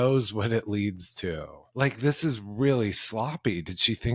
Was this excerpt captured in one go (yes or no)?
no